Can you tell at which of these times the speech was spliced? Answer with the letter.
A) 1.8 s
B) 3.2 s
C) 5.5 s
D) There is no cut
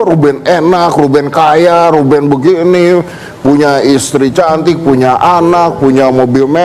D